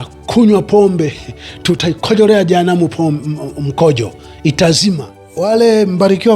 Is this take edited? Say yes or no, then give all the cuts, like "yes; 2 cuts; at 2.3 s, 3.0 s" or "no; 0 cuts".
yes; 2 cuts; at 1.8 s, 4.8 s